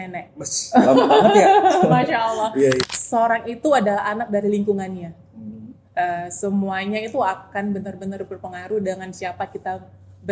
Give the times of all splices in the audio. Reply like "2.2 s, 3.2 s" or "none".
2.8 s